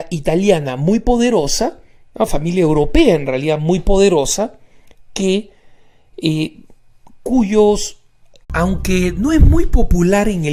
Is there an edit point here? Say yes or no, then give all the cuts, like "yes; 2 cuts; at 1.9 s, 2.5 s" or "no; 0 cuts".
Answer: no; 0 cuts